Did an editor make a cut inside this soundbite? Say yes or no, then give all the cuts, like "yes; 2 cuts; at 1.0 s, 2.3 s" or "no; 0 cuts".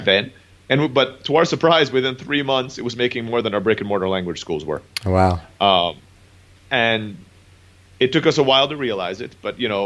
no; 0 cuts